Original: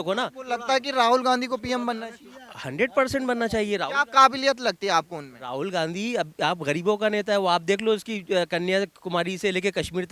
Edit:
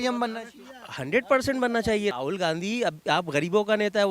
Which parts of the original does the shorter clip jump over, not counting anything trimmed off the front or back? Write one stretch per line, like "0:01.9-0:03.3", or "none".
0:03.8-0:05.5